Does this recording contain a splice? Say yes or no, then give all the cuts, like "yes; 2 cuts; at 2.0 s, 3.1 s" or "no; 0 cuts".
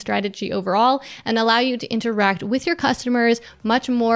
no; 0 cuts